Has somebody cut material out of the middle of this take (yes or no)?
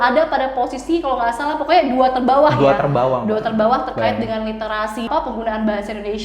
yes